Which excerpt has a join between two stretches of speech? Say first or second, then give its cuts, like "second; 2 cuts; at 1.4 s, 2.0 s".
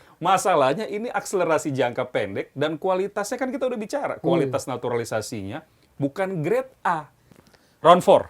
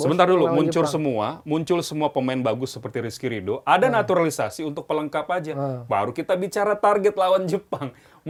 first; 1 cut; at 7.4 s